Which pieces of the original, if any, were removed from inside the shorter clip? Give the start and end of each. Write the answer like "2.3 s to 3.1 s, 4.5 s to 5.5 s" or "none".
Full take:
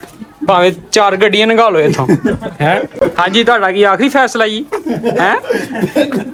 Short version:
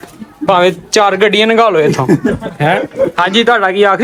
none